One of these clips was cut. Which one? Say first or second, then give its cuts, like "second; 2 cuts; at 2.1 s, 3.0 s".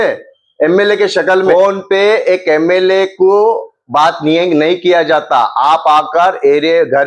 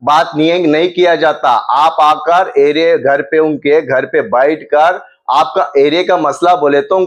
first; 1 cut; at 1.5 s